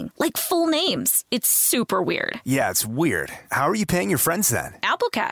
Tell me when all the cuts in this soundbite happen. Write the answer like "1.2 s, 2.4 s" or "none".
none